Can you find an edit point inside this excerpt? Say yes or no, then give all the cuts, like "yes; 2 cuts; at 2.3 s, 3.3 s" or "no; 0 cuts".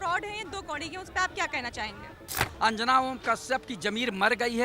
yes; 1 cut; at 2.5 s